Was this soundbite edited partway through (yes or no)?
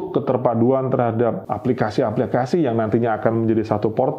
yes